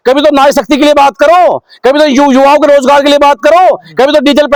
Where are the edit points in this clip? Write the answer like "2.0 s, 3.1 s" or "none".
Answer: none